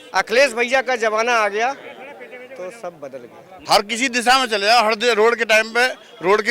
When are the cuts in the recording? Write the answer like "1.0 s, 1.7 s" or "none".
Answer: 3.5 s